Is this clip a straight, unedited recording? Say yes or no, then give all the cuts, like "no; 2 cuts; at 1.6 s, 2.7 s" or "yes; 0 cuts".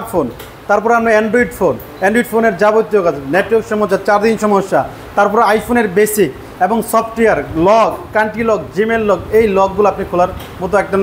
yes; 0 cuts